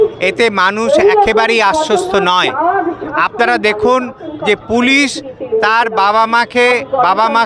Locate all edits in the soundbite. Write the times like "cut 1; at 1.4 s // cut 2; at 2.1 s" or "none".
none